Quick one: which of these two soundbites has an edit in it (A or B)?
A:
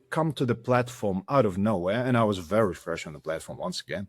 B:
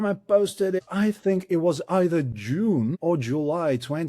B